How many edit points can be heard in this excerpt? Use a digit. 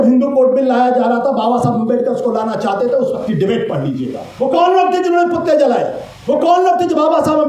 2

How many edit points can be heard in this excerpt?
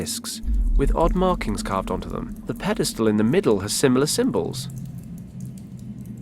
1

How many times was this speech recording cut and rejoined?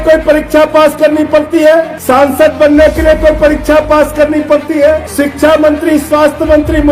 2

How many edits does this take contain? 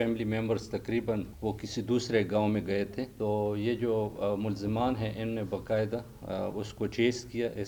2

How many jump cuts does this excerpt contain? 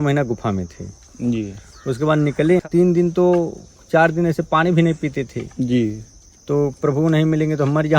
1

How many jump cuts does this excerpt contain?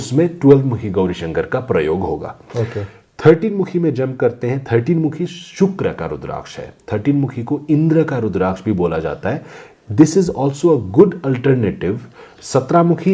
0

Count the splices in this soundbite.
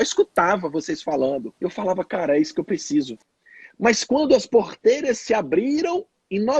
1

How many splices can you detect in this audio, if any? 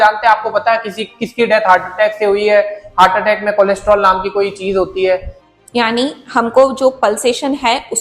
1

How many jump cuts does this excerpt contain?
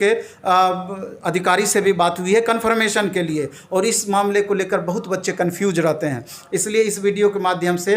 0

